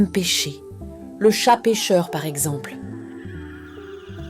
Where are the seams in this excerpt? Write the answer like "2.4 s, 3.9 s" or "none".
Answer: 2.5 s